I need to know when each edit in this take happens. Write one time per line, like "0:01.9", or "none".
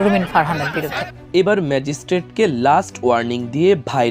0:01.2